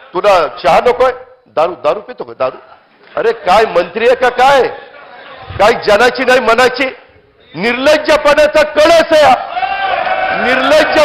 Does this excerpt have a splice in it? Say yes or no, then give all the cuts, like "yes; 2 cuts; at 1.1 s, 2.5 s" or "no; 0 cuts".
no; 0 cuts